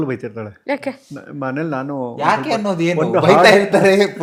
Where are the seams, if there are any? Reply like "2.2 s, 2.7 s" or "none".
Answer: none